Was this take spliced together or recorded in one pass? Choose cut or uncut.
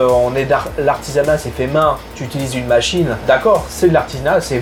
uncut